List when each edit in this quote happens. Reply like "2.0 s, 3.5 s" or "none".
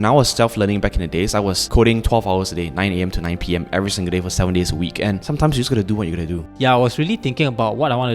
1.6 s, 5.2 s, 6.5 s